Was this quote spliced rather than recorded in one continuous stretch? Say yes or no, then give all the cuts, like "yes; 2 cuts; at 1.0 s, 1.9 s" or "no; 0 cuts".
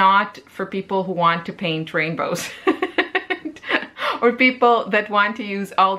no; 0 cuts